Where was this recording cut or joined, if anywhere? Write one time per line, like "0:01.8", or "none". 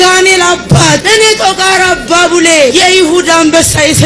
0:01.0
0:02.7